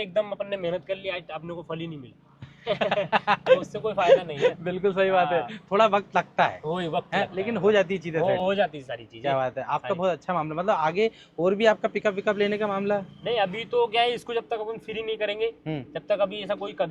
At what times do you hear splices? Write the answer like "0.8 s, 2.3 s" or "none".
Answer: none